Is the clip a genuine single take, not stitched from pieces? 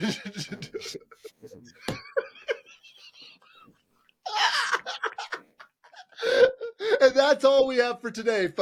yes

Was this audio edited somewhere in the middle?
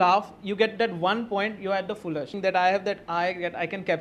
yes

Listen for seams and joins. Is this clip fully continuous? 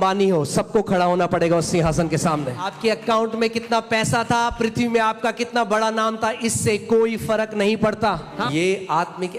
no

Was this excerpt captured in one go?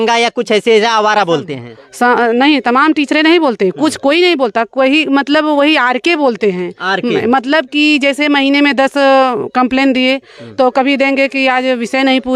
yes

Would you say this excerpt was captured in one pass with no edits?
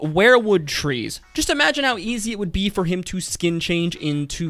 no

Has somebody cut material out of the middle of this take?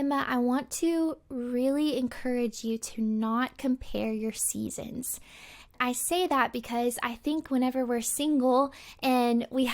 yes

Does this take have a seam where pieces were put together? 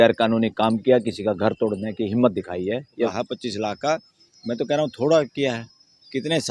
yes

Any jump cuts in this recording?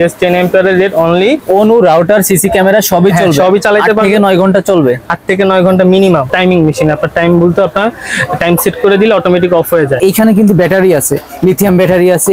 yes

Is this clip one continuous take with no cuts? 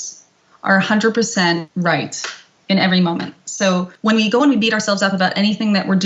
no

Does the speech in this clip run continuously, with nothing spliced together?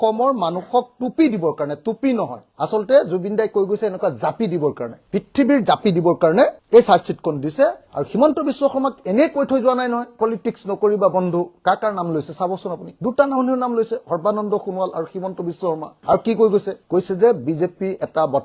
yes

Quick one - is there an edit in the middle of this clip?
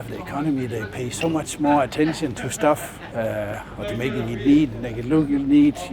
yes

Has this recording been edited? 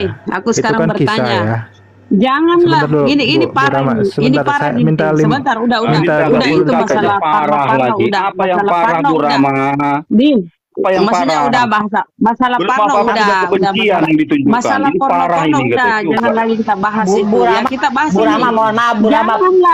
no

